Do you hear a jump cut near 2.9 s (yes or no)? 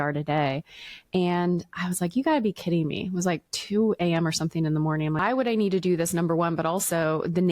no